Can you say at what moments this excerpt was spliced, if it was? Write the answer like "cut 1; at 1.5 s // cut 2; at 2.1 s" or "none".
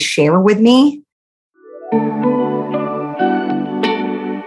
cut 1; at 1.3 s